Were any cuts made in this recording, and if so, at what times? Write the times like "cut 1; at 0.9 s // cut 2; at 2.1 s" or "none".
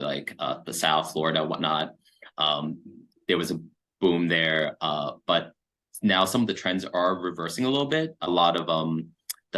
cut 1; at 8.3 s